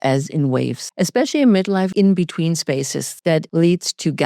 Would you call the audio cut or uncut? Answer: cut